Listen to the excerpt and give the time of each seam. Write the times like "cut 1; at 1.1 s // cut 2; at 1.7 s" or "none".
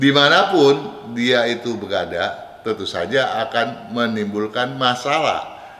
none